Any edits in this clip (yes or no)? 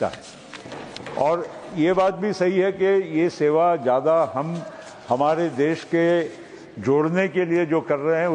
no